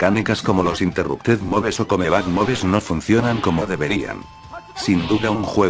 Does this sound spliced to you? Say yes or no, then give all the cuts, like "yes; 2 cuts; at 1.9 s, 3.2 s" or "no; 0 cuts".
yes; 1 cut; at 0.9 s